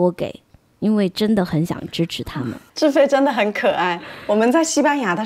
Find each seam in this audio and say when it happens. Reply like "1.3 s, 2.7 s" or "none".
2.6 s